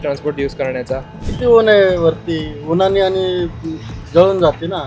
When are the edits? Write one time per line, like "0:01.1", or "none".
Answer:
0:01.3